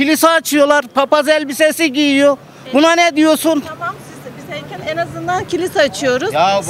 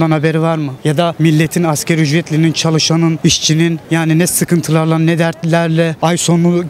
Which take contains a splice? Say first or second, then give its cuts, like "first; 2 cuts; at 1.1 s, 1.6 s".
second; 3 cuts; at 1.0 s, 3.5 s, 5.9 s